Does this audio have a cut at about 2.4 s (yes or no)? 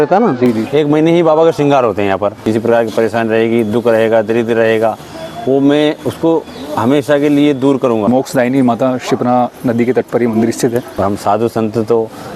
yes